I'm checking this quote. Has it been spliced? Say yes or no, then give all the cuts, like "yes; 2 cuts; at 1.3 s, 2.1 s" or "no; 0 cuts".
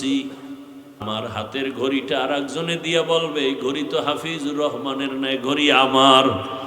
yes; 1 cut; at 1.1 s